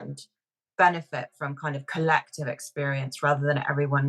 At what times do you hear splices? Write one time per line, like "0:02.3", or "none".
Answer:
none